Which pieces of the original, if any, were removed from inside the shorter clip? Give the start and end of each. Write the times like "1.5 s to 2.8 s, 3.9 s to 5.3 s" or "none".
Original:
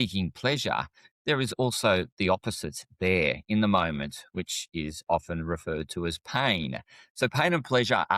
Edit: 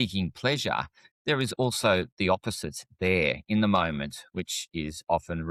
none